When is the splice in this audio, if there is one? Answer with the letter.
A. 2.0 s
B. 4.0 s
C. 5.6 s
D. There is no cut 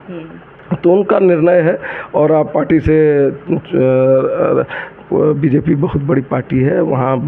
D